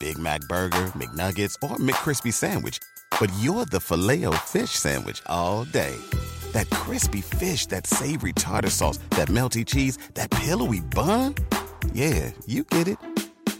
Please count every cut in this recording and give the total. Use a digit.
0